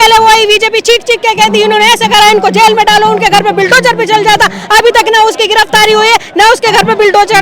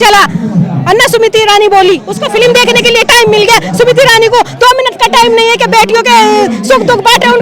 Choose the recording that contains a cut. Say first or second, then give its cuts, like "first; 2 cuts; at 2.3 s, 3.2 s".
second; 1 cut; at 2.2 s